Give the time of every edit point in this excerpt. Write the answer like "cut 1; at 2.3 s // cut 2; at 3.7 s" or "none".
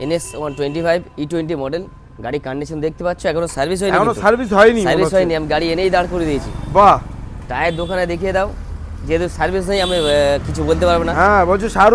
none

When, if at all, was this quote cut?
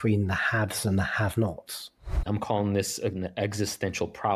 cut 1; at 2.2 s

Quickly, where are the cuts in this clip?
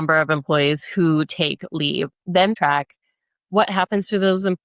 cut 1; at 2.5 s

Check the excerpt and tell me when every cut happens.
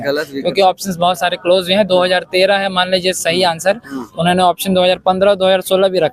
none

